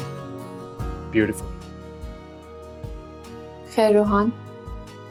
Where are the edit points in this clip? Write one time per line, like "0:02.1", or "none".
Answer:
none

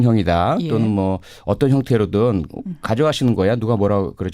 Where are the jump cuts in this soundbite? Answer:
0:03.3

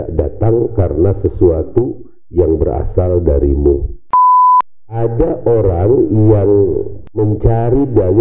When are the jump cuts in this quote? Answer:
0:03.9
0:04.8
0:07.0

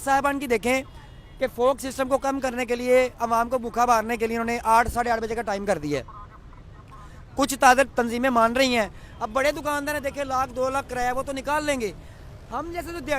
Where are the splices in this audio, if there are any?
0:07.9

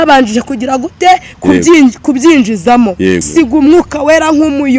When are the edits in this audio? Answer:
0:03.3

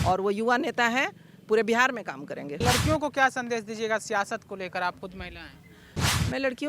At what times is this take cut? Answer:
0:02.6

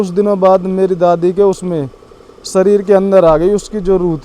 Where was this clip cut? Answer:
none

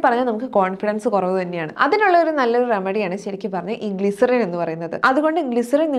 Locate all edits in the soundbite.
0:01.6
0:04.9

